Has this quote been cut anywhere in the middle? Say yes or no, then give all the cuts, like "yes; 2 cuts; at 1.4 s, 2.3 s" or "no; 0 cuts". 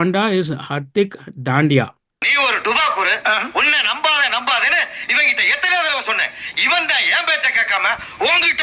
no; 0 cuts